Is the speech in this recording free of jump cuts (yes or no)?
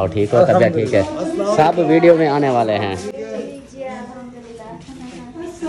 yes